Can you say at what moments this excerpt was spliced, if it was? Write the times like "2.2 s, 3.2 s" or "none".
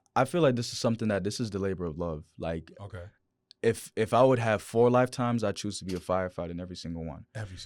none